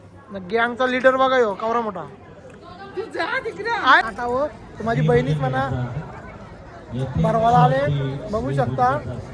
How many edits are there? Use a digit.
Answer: 1